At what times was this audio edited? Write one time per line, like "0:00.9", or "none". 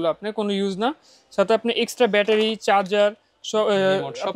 none